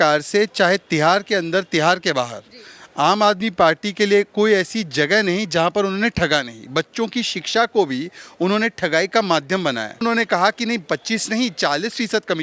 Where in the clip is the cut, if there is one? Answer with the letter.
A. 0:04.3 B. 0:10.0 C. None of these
B